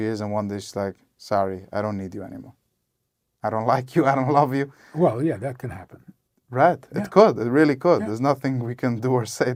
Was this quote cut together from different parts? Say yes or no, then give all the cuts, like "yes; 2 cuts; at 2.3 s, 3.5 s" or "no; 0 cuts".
no; 0 cuts